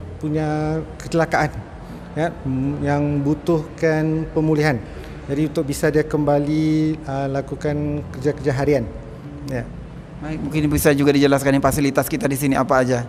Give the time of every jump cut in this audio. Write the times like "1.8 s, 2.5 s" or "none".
none